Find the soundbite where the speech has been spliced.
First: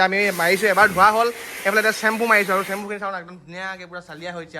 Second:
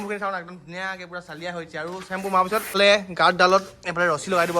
second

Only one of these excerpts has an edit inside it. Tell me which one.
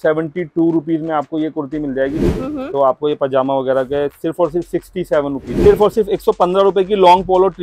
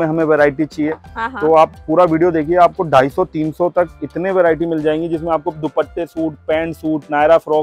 first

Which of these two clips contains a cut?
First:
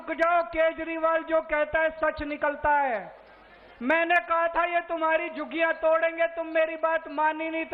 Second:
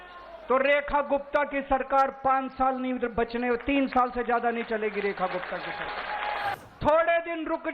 second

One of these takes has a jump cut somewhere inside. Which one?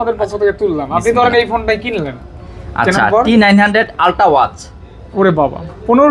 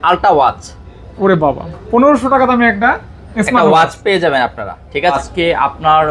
second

